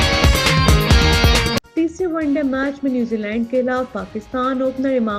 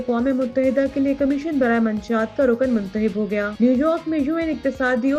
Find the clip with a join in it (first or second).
first